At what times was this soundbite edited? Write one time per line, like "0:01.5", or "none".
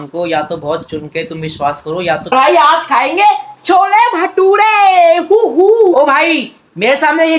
0:02.3
0:05.9

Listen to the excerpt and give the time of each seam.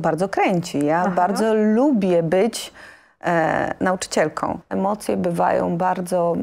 0:04.6

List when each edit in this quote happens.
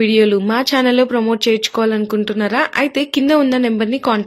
none

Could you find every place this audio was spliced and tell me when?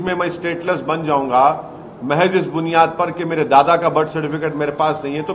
none

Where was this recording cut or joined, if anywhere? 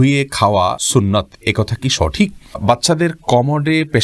0:00.8
0:02.6

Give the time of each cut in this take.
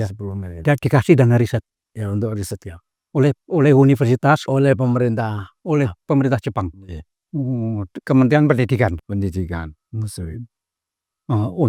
none

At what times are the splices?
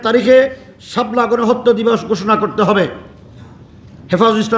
none

